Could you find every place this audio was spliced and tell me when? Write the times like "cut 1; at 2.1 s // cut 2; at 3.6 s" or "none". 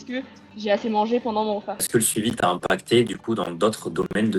none